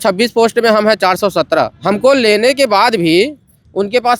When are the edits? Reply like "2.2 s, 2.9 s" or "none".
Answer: 1.8 s